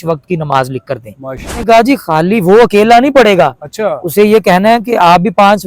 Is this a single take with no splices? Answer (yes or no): no